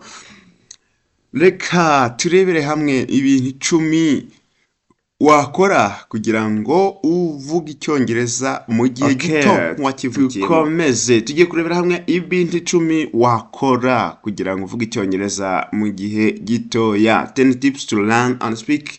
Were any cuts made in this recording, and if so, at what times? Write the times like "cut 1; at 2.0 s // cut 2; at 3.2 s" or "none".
cut 1; at 10.1 s

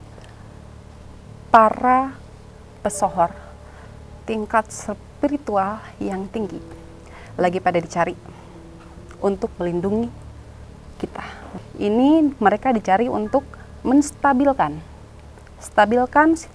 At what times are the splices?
cut 1; at 11.6 s

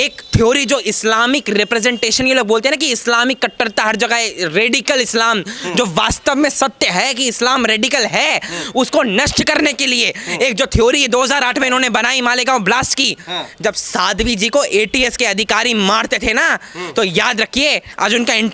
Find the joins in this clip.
none

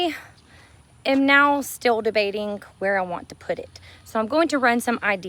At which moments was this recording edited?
none

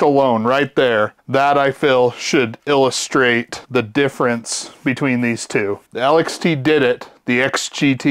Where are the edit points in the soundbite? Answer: cut 1; at 1.2 s

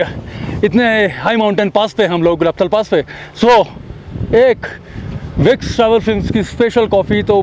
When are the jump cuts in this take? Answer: none

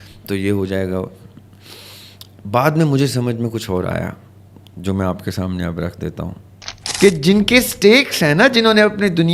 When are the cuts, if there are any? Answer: cut 1; at 6.8 s

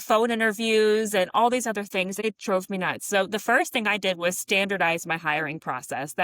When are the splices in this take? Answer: cut 1; at 2.2 s

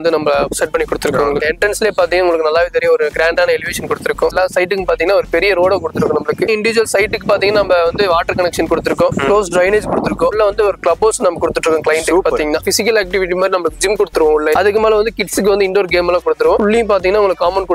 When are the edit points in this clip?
cut 1; at 1.4 s // cut 2; at 4.3 s // cut 3; at 6.5 s // cut 4; at 10.3 s // cut 5; at 12.7 s // cut 6; at 16.6 s

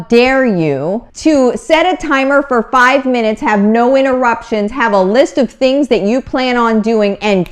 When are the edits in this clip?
cut 1; at 1.1 s

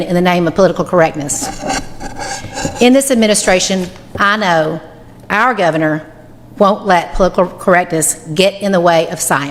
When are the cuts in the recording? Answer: none

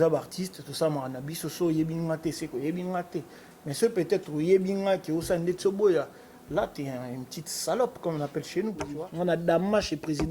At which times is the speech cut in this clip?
cut 1; at 8.8 s

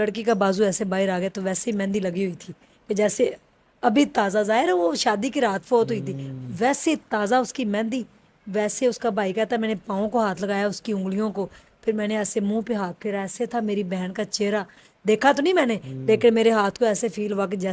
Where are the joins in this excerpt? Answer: none

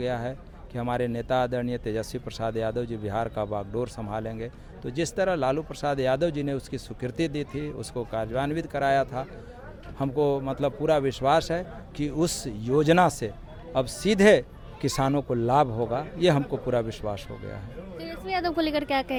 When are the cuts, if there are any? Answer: none

